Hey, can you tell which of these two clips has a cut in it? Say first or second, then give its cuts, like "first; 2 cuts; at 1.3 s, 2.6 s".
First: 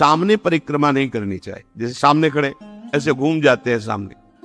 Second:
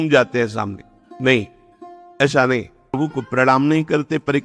second; 1 cut; at 3.0 s